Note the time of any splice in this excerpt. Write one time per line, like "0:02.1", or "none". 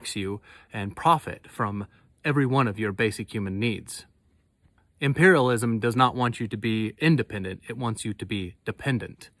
0:04.3